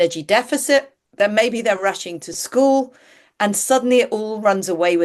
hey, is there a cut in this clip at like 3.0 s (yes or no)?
no